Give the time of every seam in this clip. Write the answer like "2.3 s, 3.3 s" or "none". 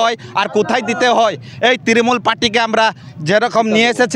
none